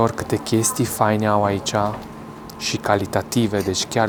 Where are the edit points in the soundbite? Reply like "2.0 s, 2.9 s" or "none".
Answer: none